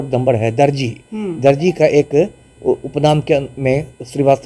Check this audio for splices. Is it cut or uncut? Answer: uncut